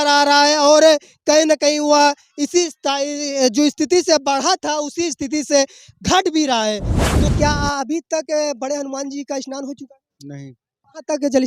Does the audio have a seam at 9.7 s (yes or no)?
no